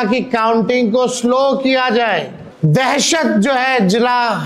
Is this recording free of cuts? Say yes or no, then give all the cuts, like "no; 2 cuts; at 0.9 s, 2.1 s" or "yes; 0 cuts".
no; 1 cut; at 2.4 s